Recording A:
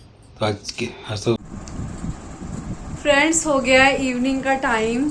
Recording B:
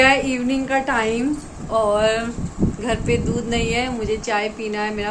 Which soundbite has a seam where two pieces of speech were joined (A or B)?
A